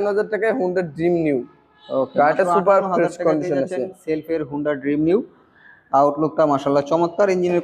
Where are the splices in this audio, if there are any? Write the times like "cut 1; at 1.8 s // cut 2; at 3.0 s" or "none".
none

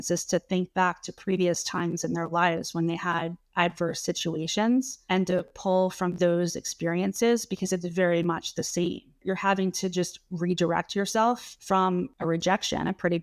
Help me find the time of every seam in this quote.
cut 1; at 5.0 s // cut 2; at 9.2 s // cut 3; at 11.9 s

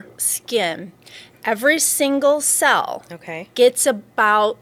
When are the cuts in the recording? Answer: none

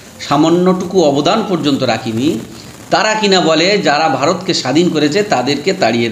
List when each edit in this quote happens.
none

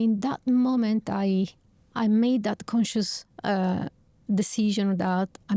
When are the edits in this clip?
none

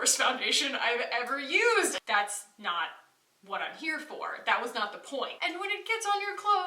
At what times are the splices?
cut 1; at 2.0 s // cut 2; at 5.3 s

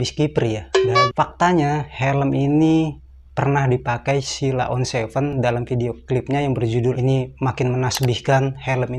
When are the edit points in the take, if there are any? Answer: cut 1; at 1.1 s // cut 2; at 7.0 s

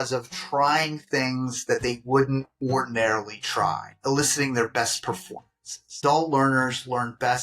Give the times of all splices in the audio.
cut 1; at 3.9 s // cut 2; at 5.9 s

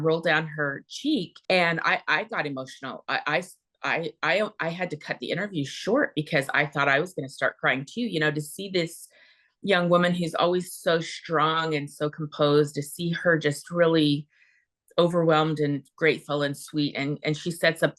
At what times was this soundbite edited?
cut 1; at 1.3 s

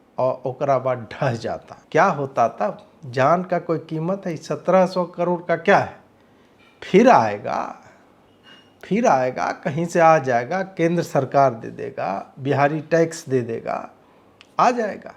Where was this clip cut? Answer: cut 1; at 1.7 s

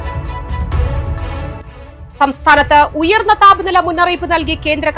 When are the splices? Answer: cut 1; at 1.7 s

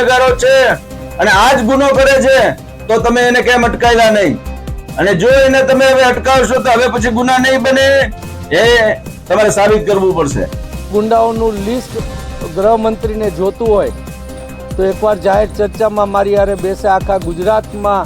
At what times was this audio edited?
cut 1; at 10.9 s

